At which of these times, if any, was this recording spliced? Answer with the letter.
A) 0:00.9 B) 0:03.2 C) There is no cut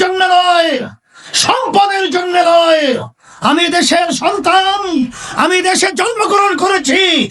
C